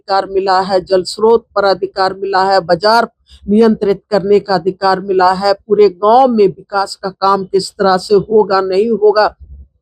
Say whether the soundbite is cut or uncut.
uncut